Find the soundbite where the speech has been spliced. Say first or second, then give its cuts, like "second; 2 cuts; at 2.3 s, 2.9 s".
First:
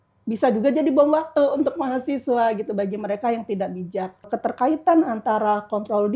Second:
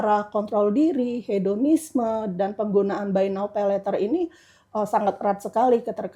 first; 1 cut; at 4.3 s